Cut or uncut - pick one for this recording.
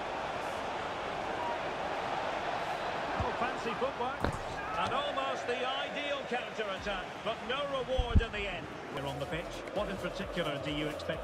cut